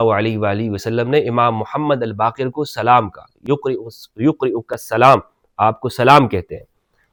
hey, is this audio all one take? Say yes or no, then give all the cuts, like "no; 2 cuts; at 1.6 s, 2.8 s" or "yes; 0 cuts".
yes; 0 cuts